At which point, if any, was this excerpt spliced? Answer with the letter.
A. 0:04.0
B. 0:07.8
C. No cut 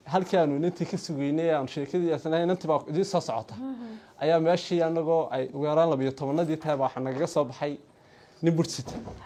C